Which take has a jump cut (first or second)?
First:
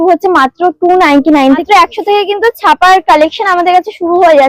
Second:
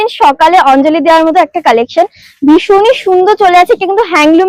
first